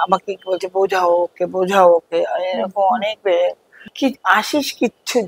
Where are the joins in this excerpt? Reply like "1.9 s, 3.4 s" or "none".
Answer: 3.9 s